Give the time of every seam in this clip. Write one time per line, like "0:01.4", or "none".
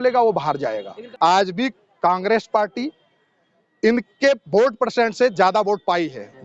0:01.0